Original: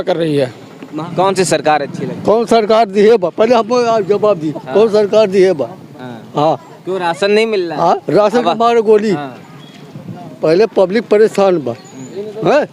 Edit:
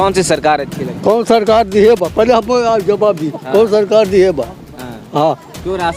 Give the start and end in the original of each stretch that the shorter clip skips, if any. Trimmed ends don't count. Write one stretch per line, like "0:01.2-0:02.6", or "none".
none